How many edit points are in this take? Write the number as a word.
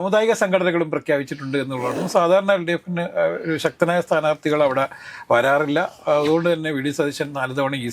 one